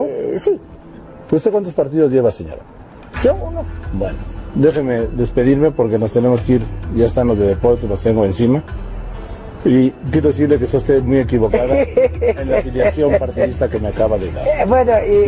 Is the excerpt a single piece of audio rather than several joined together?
yes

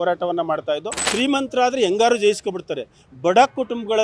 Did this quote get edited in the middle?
yes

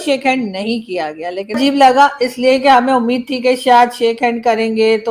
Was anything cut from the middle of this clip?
yes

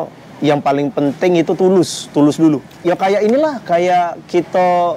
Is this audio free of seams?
no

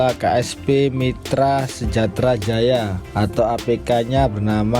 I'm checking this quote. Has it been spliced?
no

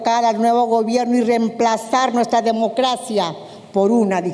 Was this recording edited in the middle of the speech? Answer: no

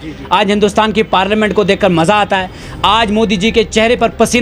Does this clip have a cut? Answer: no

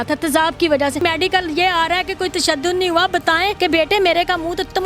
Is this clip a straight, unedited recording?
no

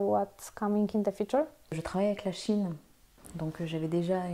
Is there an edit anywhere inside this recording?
yes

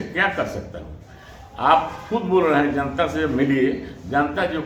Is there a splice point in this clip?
no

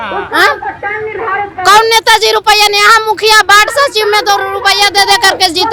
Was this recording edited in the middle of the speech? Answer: no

